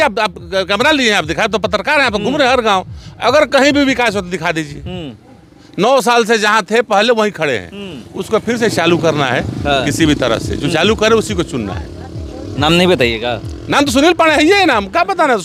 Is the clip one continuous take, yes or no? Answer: yes